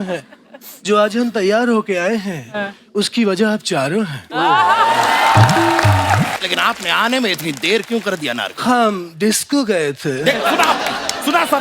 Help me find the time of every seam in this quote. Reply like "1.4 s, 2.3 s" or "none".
6.4 s